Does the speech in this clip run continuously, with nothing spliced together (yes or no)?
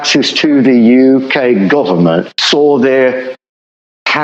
no